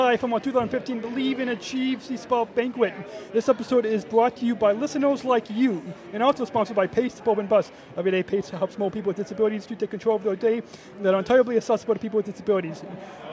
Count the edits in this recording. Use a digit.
1